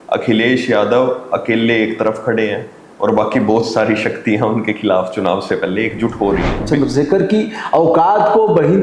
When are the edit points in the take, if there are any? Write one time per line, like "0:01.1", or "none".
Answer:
0:06.6